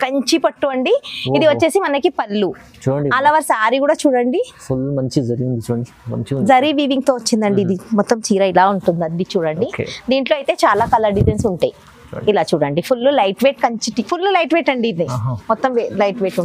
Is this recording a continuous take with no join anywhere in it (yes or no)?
no